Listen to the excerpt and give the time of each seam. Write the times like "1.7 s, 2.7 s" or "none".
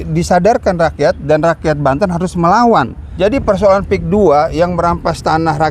3.1 s